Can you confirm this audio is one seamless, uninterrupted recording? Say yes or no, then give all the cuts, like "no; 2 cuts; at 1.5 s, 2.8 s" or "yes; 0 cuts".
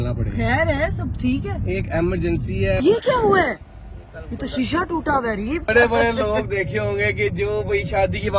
no; 2 cuts; at 2.8 s, 5.7 s